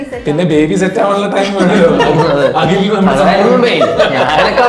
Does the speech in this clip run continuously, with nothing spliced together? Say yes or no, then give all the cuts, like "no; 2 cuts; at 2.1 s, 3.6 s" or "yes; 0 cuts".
yes; 0 cuts